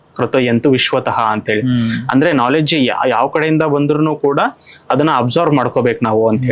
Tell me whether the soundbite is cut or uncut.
uncut